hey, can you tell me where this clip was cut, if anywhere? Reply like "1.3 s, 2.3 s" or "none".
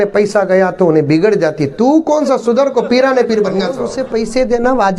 3.8 s

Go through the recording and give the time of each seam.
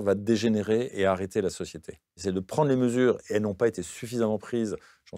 2.2 s

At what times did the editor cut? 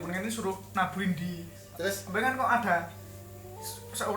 1.7 s

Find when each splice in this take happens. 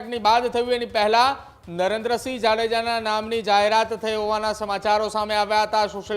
none

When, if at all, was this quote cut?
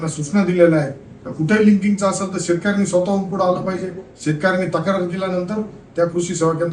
none

